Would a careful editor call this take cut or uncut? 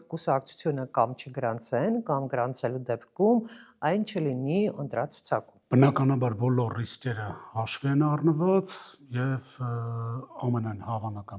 uncut